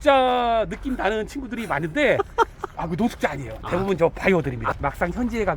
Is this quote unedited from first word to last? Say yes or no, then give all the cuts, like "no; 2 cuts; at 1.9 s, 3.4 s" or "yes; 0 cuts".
no; 1 cut; at 4.7 s